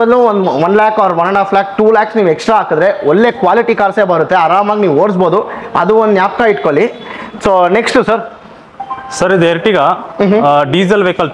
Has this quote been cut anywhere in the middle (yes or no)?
no